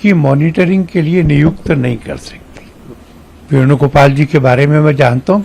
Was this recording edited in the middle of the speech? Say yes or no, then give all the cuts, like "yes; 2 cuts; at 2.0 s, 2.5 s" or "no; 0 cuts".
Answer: yes; 1 cut; at 2.9 s